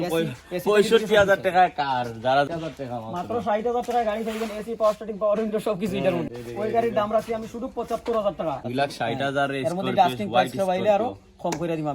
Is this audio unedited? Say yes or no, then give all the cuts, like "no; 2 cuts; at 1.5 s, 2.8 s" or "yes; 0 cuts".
no; 3 cuts; at 2.5 s, 6.2 s, 8.6 s